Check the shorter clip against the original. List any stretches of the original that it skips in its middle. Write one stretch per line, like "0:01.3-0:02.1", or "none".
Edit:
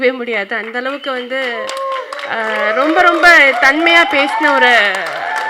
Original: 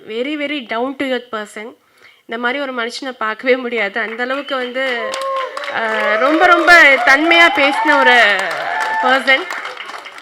none